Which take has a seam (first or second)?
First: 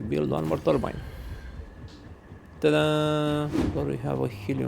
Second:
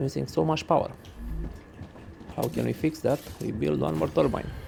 first